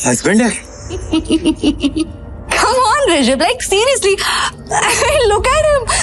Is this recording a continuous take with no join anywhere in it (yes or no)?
no